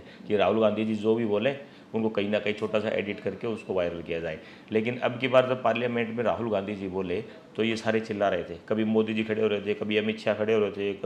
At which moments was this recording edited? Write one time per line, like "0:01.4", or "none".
none